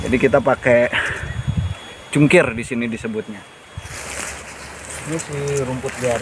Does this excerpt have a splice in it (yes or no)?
yes